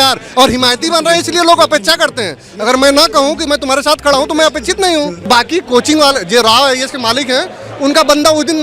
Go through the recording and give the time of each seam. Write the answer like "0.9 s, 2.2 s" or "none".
5.3 s